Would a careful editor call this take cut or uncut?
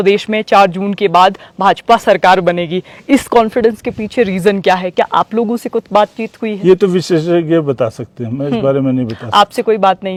uncut